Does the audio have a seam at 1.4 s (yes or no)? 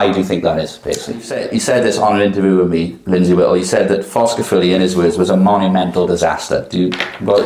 yes